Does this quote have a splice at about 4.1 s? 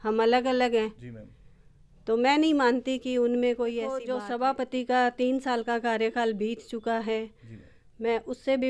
yes; 1 cut; at 4.1 s

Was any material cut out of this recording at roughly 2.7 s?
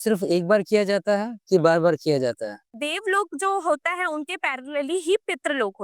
yes; 1 cut; at 2.7 s

